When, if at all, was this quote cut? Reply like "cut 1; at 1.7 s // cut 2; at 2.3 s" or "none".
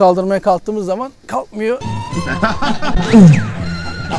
none